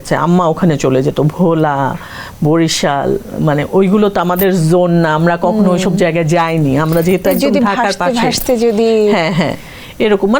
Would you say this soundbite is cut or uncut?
uncut